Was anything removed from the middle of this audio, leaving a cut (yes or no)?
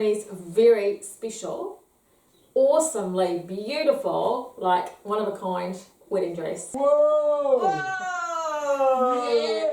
yes